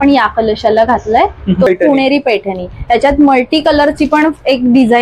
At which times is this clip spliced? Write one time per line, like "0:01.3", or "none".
0:01.7